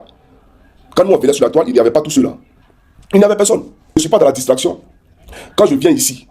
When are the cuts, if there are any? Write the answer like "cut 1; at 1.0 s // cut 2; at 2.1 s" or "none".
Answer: cut 1; at 4.0 s